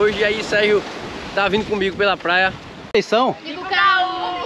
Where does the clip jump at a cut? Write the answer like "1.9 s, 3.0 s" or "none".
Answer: 2.9 s